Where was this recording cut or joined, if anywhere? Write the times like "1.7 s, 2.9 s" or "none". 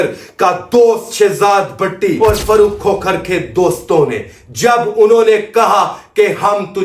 2.2 s